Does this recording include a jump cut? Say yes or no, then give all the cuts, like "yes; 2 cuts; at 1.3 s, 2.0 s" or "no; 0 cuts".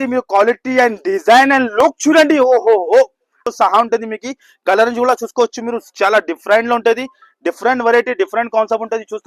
yes; 1 cut; at 3.4 s